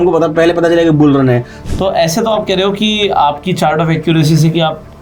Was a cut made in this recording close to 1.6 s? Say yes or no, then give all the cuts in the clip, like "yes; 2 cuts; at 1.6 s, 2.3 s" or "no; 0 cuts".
yes; 1 cut; at 1.6 s